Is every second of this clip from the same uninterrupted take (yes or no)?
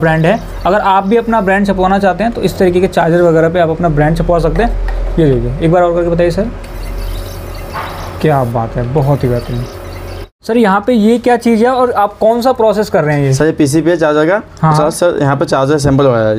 yes